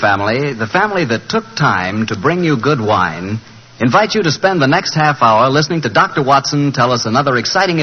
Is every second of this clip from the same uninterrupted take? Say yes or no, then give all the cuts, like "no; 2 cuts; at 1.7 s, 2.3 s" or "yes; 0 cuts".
yes; 0 cuts